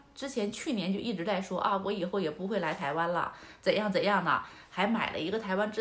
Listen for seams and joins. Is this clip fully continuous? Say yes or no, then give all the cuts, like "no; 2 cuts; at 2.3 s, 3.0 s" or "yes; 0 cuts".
yes; 0 cuts